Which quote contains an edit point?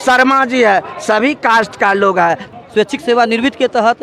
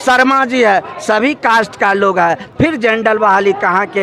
first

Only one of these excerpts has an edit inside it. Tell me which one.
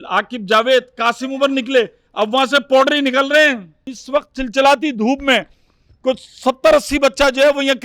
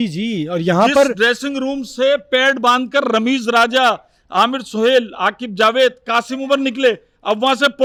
first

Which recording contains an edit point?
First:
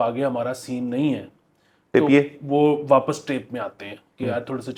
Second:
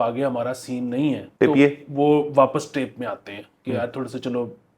second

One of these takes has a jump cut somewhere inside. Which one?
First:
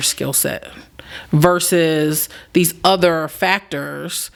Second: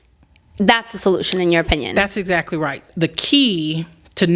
second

